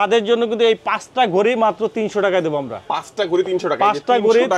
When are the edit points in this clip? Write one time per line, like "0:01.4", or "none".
none

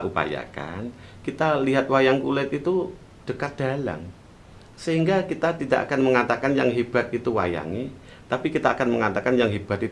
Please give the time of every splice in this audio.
none

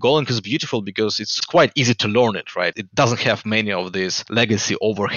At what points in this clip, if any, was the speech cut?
0:01.2
0:02.8
0:04.2

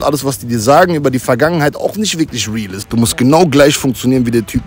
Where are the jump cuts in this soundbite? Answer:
0:02.7

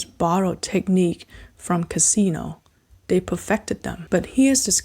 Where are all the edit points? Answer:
0:03.9

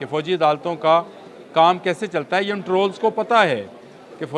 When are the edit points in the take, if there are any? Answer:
none

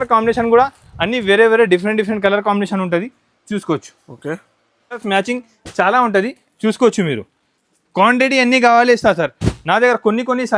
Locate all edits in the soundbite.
0:05.0

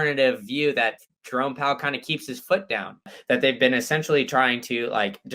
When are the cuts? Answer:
0:01.1
0:03.1

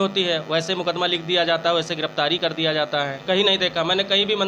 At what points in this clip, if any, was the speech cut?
0:03.2

